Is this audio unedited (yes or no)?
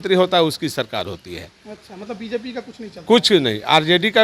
yes